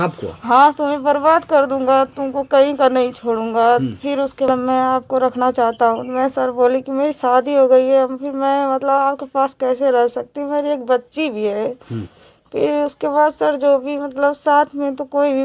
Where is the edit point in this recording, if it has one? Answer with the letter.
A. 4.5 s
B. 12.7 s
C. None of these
A